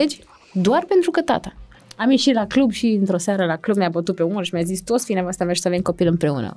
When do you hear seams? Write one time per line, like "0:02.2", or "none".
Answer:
0:01.8